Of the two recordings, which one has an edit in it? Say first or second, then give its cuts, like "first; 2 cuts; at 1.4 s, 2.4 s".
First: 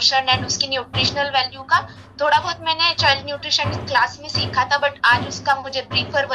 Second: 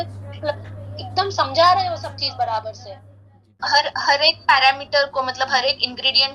second; 1 cut; at 3.6 s